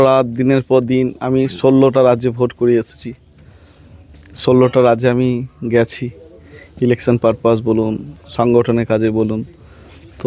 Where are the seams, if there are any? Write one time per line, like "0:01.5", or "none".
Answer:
none

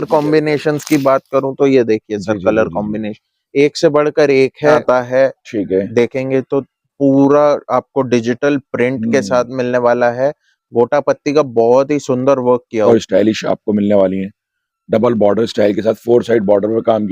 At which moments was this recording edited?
0:04.8
0:12.9

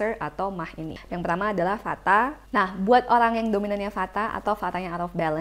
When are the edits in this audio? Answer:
0:01.0
0:02.4

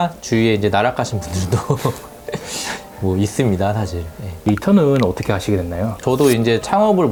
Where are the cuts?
none

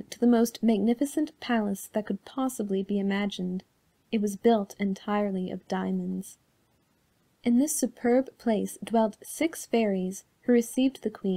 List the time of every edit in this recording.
0:09.2

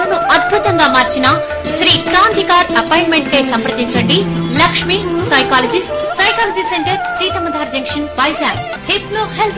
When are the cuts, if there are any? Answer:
none

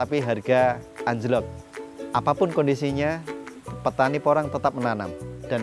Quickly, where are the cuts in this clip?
0:01.6

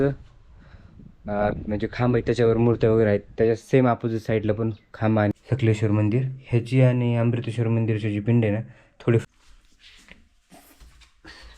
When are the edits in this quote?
0:05.3
0:09.2

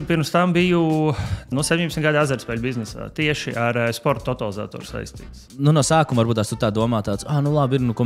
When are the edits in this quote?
0:01.5
0:05.4

